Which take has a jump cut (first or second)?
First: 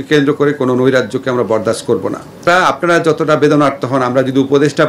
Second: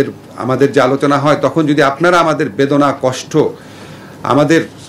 first